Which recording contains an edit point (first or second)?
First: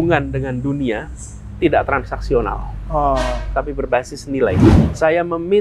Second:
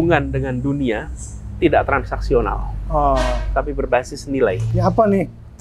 first